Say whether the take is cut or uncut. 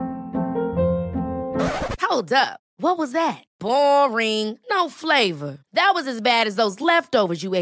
uncut